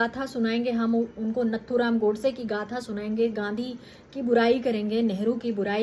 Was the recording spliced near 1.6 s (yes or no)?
no